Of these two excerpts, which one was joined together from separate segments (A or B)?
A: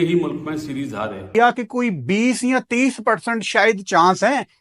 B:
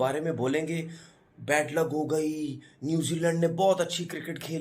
A